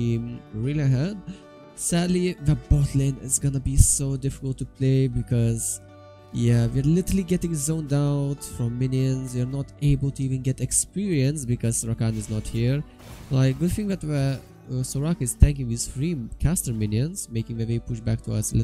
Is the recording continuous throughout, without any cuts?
yes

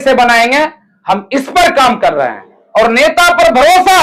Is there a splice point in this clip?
no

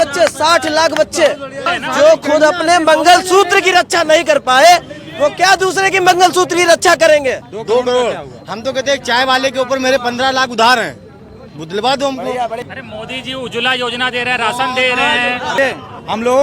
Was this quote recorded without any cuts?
no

